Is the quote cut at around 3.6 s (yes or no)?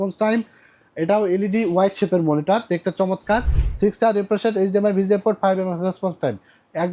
yes